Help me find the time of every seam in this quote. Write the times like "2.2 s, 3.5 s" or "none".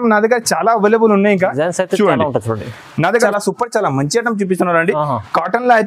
3.2 s

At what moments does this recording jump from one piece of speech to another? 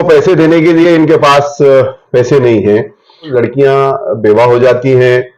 3.3 s

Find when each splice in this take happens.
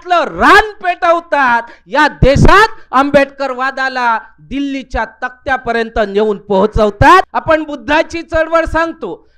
7.3 s

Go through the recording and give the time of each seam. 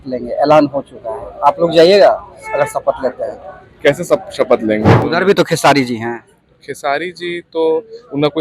5.0 s

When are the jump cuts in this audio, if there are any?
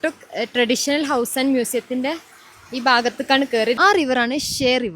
3.8 s

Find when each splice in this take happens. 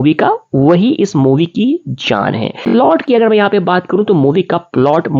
2.9 s

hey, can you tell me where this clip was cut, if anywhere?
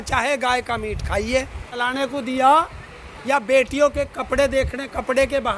1.8 s

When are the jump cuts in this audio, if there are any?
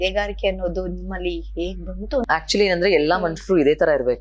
2.3 s

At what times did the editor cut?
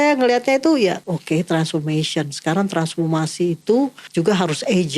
1.0 s, 4.0 s

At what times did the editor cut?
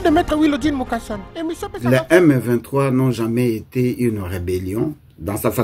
1.7 s

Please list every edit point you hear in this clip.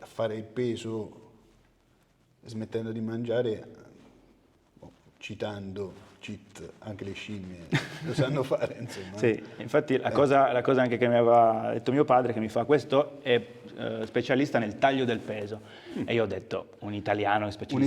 none

